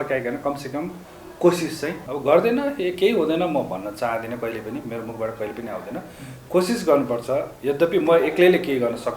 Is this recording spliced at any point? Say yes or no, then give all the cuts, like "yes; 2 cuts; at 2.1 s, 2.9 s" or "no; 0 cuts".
yes; 1 cut; at 2.0 s